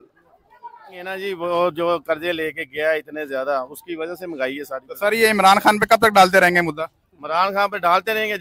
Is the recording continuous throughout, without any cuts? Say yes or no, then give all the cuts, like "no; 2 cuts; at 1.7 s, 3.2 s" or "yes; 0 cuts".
no; 1 cut; at 1.1 s